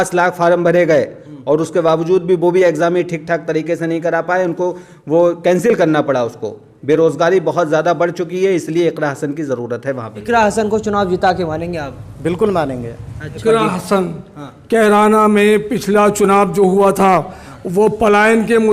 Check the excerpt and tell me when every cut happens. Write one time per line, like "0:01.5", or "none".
0:10.2
0:13.4